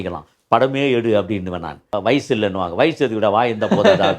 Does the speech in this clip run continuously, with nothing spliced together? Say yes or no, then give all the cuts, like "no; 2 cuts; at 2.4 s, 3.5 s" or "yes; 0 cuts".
no; 1 cut; at 1.9 s